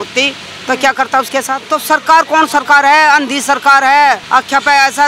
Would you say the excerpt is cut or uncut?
cut